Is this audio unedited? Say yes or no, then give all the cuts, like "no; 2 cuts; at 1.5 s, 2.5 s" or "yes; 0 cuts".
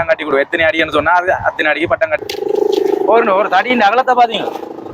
no; 1 cut; at 2.2 s